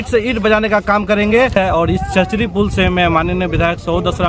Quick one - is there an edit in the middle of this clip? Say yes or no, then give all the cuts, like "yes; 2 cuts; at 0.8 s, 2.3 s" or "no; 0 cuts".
yes; 1 cut; at 1.5 s